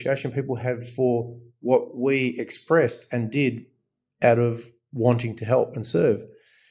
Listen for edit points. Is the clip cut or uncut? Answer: uncut